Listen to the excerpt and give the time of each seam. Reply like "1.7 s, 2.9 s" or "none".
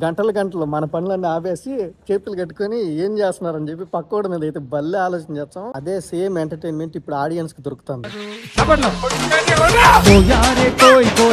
5.7 s, 8.2 s

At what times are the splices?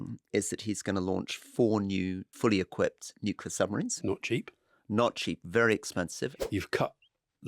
2.2 s, 3.9 s, 6.4 s

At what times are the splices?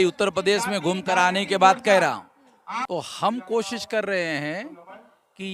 2.8 s

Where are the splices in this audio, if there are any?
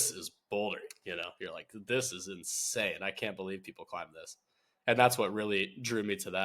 4.6 s

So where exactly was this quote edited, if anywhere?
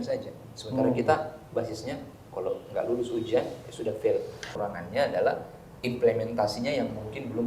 4.5 s

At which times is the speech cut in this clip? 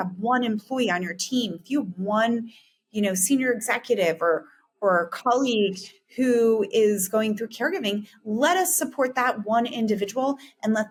none

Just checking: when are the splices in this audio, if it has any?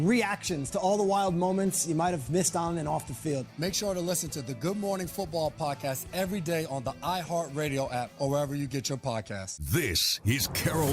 9.5 s

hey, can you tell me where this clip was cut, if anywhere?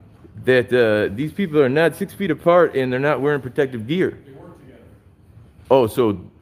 none

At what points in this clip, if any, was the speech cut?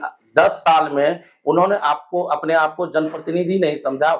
none

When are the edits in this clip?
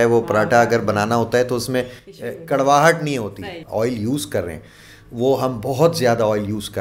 3.6 s

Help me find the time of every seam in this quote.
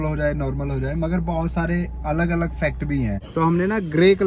3.2 s

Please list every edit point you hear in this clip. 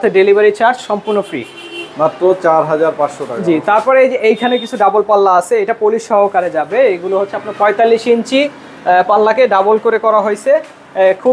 none

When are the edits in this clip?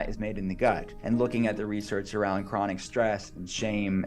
0.9 s

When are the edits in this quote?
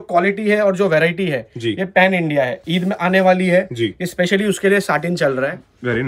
none

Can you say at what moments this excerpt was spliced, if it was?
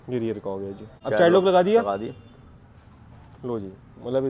1.0 s

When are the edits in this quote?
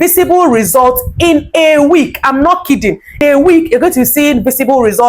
3.2 s

